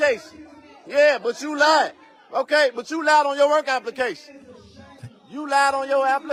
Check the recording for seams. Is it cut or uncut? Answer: uncut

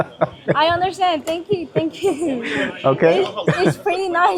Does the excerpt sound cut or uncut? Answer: uncut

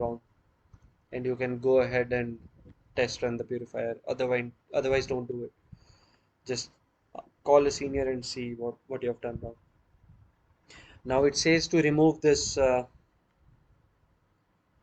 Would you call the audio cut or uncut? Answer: uncut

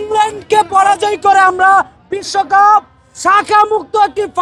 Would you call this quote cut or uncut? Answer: uncut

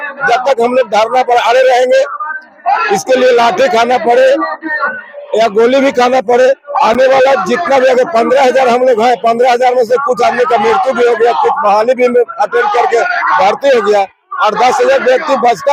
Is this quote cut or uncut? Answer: uncut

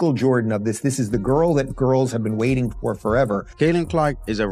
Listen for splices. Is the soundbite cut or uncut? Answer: cut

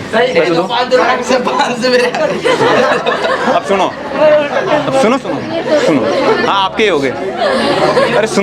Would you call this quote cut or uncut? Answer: uncut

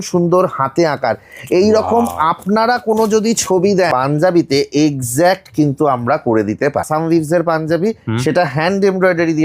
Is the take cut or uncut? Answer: cut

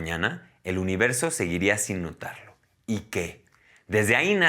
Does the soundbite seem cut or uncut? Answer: uncut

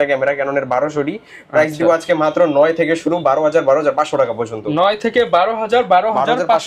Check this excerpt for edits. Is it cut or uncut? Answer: uncut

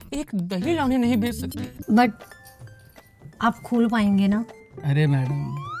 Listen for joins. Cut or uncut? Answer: cut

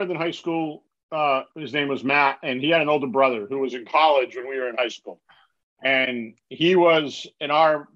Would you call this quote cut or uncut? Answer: uncut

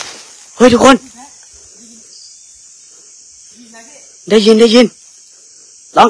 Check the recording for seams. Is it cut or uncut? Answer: uncut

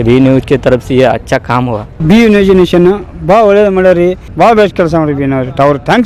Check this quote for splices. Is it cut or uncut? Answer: cut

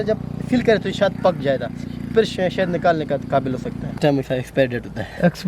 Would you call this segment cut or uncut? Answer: cut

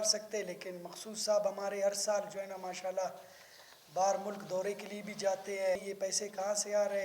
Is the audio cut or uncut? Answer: cut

